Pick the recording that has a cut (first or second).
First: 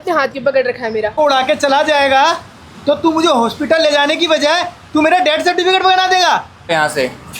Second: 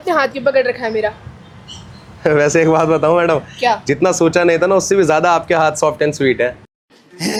first